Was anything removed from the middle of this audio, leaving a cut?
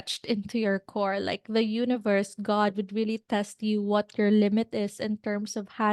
no; 0 cuts

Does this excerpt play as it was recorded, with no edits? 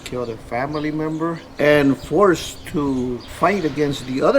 no; 2 cuts; at 1.4 s, 3.2 s

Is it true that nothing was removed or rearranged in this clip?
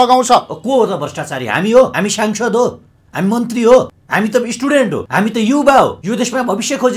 no; 4 cuts; at 1.9 s, 4.0 s, 5.0 s, 6.0 s

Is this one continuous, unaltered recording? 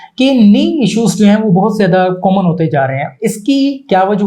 yes; 0 cuts

